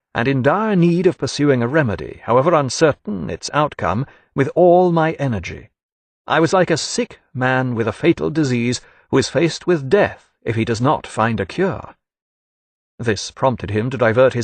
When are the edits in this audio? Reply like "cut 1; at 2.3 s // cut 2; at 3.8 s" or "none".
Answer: none